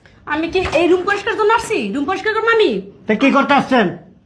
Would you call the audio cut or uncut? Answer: uncut